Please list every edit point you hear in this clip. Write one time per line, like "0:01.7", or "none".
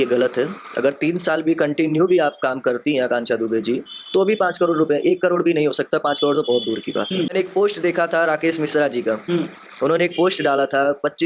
0:07.3

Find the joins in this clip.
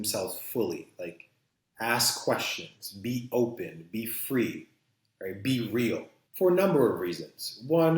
0:06.2

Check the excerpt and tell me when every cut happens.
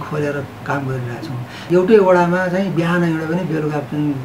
0:01.5

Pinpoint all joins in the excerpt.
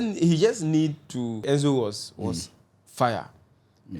0:01.4

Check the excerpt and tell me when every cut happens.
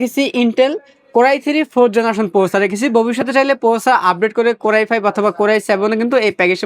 none

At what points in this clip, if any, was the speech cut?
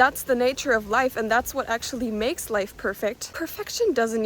0:03.3

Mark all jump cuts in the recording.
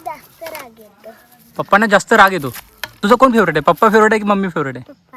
0:03.0

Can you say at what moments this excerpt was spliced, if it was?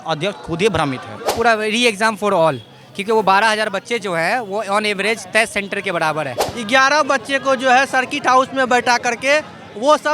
0:01.3
0:06.5

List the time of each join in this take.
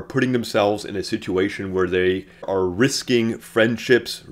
0:02.5

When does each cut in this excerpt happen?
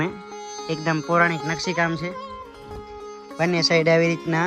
0:02.1
0:03.4

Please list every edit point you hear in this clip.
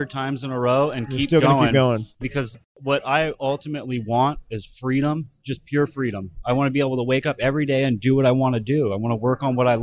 0:02.2

